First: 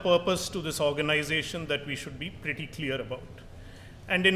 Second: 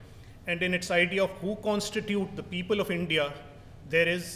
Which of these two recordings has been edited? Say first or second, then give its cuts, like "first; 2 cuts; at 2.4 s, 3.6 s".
second; 1 cut; at 2.0 s